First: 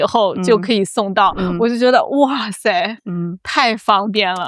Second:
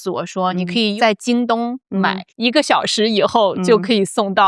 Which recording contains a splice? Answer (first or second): second